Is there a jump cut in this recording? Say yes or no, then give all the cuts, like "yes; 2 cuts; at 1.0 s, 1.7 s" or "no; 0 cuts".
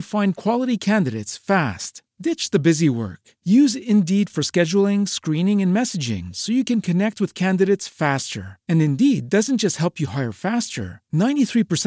no; 0 cuts